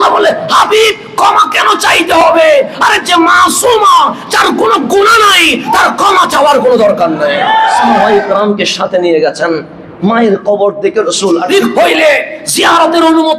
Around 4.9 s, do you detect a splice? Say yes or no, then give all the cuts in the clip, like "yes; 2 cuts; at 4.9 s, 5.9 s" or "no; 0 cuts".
no; 2 cuts; at 8.0 s, 11.4 s